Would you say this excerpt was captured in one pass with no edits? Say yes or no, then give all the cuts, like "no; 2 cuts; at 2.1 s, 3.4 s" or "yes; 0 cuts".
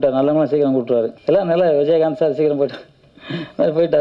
no; 1 cut; at 1.2 s